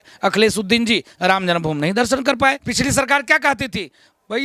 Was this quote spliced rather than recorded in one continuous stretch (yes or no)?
yes